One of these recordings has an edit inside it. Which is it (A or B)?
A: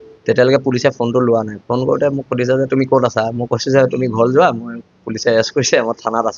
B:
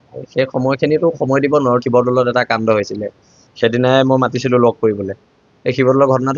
B